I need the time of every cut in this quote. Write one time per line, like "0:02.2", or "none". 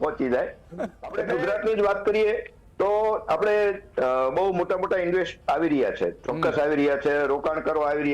0:01.3